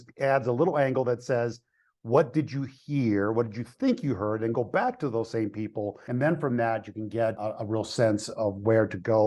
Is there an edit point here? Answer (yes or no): yes